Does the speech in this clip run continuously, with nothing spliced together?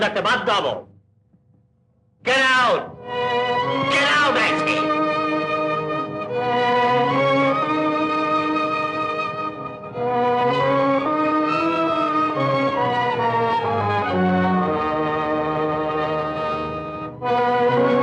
yes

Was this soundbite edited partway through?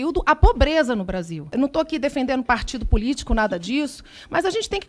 yes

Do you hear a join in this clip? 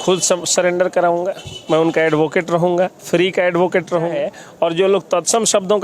yes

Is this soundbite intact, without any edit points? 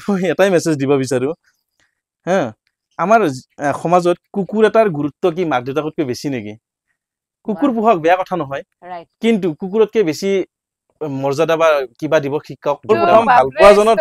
no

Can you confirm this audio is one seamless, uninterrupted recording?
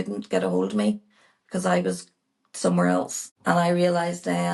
yes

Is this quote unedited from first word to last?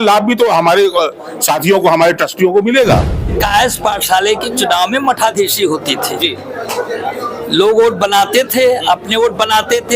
no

